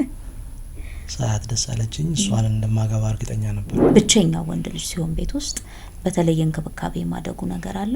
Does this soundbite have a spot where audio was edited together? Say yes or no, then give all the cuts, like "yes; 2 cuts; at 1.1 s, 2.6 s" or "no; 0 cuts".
yes; 1 cut; at 3.9 s